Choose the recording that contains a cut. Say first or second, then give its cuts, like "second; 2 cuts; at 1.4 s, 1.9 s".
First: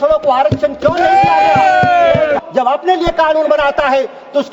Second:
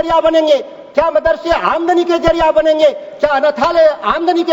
first; 1 cut; at 2.4 s